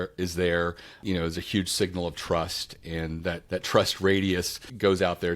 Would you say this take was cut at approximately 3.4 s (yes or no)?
yes